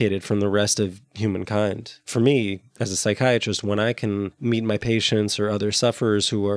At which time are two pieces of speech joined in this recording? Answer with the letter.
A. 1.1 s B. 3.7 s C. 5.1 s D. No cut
D